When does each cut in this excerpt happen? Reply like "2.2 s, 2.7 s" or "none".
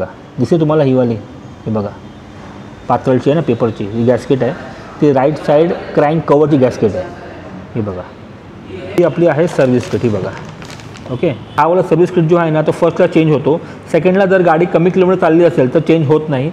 none

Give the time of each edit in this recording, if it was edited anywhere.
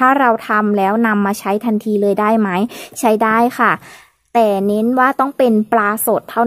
none

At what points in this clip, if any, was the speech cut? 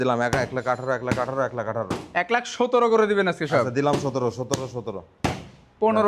none

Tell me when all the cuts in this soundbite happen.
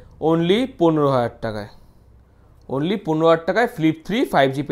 none

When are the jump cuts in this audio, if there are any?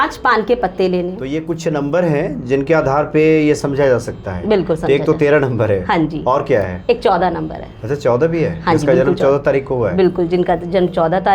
1.2 s

